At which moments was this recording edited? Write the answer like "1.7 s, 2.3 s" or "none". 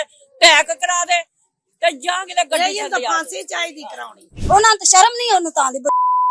4.4 s